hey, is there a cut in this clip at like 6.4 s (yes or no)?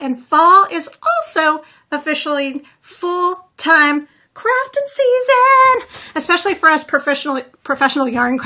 yes